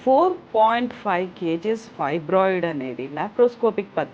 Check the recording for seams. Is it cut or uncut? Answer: uncut